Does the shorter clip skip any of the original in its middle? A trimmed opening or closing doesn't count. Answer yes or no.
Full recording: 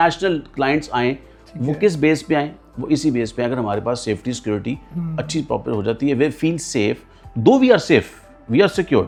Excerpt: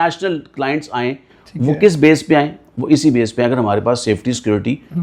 no